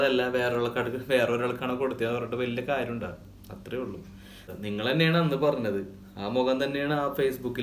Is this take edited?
yes; 1 cut; at 4.4 s

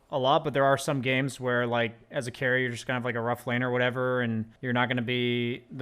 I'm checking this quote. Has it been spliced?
yes; 1 cut; at 4.5 s

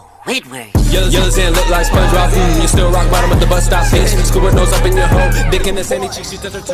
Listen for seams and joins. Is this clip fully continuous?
yes; 0 cuts

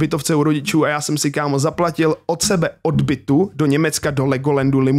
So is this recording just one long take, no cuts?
yes; 0 cuts

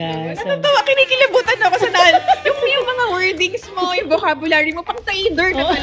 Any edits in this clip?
no; 0 cuts

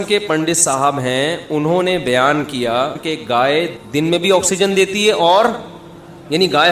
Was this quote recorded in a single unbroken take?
no; 2 cuts; at 3.0 s, 3.7 s

